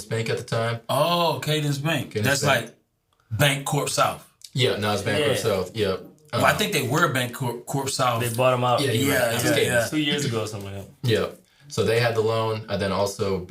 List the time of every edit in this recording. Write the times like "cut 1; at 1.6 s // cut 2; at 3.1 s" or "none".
none